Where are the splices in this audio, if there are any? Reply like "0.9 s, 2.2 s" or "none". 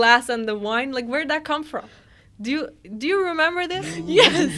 none